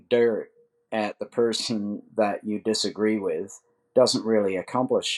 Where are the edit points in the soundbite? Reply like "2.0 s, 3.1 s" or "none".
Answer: none